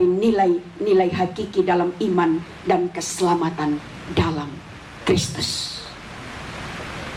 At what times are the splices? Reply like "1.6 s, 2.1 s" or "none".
none